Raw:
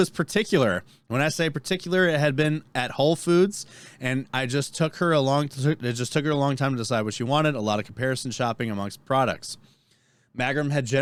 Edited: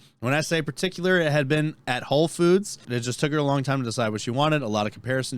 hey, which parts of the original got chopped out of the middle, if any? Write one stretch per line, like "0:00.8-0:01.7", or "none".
0:03.8-0:05.8